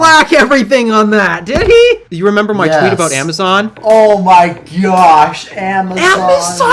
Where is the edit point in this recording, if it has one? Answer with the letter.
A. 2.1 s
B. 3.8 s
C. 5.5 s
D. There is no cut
A